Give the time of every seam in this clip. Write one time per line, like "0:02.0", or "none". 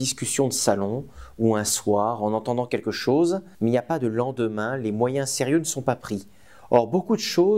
0:03.5